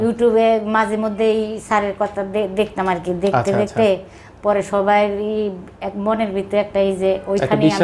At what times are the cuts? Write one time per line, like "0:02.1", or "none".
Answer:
none

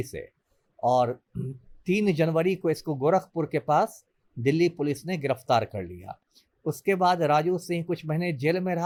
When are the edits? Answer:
none

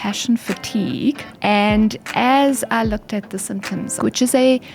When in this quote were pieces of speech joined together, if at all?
0:01.3
0:04.0

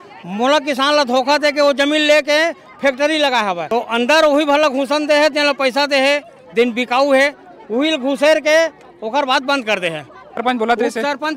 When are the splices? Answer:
0:03.6
0:10.4

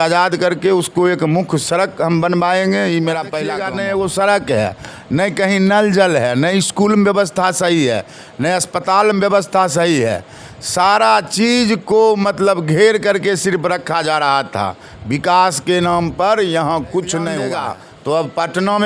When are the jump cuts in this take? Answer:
0:03.6
0:17.5

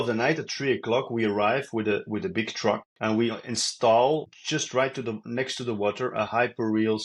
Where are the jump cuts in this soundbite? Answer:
0:02.9
0:04.4

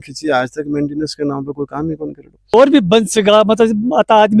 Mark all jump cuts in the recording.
0:02.5

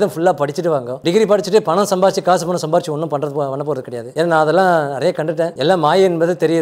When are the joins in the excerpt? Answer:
0:00.9
0:04.0
0:05.5

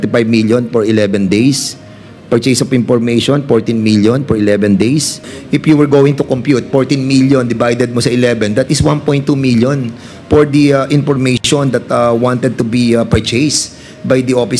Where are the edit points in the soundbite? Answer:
0:05.3

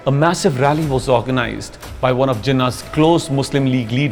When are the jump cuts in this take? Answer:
none

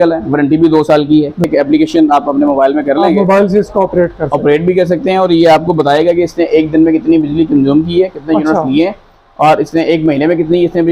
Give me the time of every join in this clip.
0:01.5

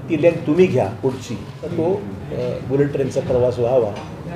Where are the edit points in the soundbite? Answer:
0:01.6

